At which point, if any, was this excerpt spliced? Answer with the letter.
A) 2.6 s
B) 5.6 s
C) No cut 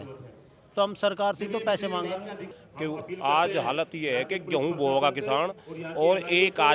A